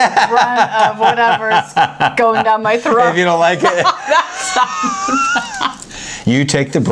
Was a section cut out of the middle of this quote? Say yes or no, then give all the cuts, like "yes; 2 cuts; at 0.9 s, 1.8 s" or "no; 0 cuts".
no; 0 cuts